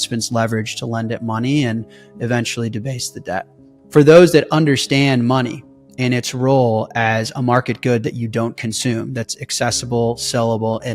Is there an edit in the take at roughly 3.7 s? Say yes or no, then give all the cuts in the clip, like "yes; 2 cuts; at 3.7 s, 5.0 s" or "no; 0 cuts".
yes; 1 cut; at 3.7 s